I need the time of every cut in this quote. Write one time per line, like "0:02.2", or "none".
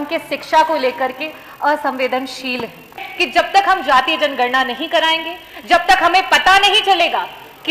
0:03.1